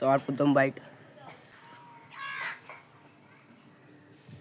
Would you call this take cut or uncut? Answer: cut